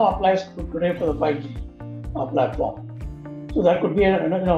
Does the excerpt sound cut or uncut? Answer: uncut